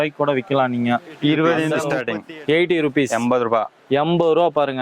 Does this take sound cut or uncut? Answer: cut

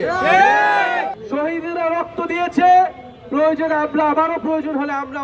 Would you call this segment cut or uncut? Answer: cut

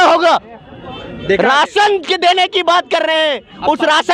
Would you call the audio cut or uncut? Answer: uncut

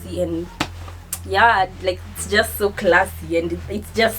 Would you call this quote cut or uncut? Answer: uncut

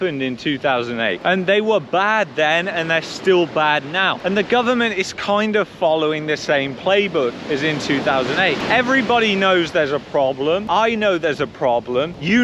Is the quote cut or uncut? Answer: uncut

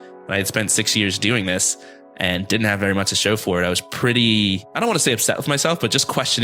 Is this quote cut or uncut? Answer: cut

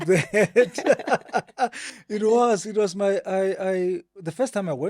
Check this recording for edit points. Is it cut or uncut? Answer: uncut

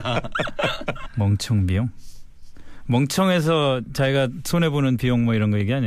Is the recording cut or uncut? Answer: uncut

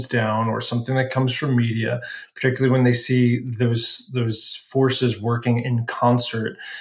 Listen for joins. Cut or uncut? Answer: uncut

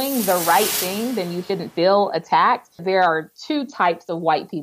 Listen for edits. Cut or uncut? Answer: cut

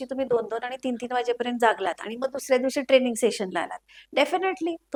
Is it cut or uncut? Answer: uncut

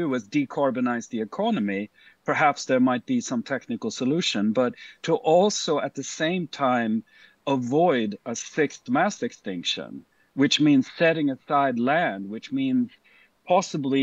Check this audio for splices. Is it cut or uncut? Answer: uncut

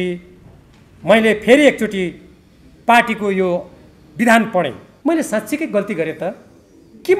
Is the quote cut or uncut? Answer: cut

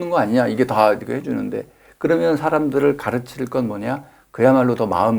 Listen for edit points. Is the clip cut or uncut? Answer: uncut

